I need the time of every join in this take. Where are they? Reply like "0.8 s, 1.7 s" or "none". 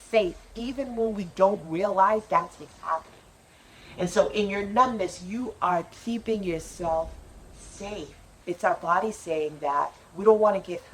8.3 s